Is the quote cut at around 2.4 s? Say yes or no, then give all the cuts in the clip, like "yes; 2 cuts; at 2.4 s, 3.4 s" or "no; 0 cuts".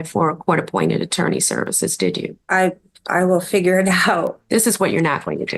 yes; 2 cuts; at 2.4 s, 4.4 s